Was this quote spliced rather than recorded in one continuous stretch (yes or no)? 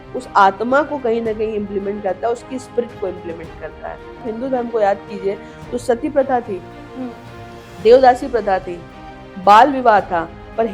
yes